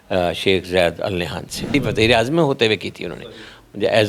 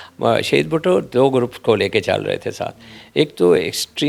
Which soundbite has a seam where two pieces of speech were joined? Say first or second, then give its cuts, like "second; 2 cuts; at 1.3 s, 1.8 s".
first; 1 cut; at 1.7 s